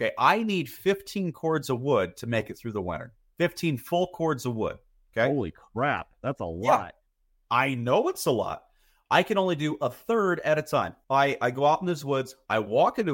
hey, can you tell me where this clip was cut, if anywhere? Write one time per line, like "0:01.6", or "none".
0:11.0